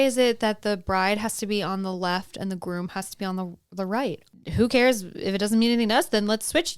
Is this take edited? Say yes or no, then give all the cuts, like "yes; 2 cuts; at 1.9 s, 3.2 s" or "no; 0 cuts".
yes; 1 cut; at 4.3 s